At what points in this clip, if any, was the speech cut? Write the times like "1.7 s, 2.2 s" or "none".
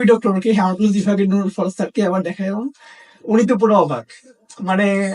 none